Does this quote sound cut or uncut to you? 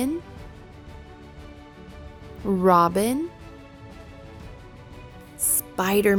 uncut